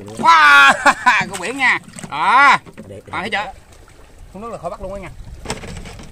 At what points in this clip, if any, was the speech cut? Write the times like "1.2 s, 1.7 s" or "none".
3.4 s